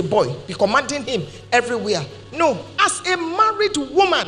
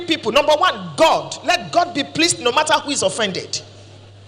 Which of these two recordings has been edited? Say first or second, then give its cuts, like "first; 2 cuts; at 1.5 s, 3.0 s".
first; 1 cut; at 2.7 s